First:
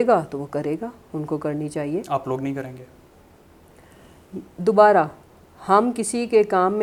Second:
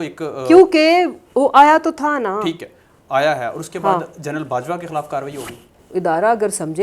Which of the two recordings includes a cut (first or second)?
second